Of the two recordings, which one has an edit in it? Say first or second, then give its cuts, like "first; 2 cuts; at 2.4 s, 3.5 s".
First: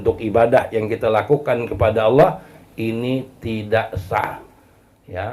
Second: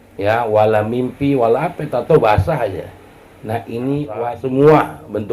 second; 1 cut; at 4.1 s